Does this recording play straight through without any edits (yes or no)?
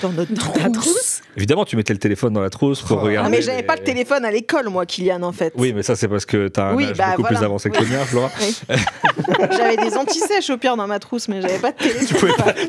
yes